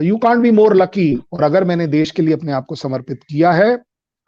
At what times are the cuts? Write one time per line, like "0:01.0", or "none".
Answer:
0:01.3